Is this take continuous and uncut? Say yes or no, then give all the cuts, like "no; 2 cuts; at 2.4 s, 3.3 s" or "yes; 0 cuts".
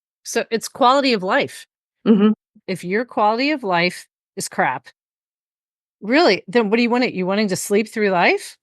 no; 1 cut; at 2.5 s